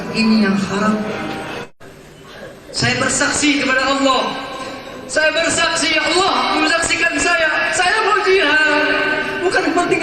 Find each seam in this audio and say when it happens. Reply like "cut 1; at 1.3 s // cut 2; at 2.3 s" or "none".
cut 1; at 1.7 s

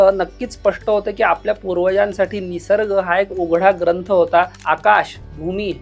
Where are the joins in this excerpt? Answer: cut 1; at 4.6 s

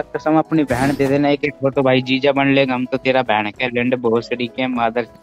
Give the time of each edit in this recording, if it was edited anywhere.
none

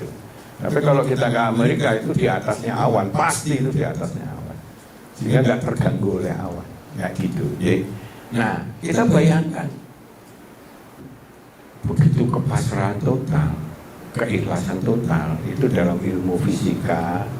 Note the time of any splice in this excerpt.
cut 1; at 11.0 s

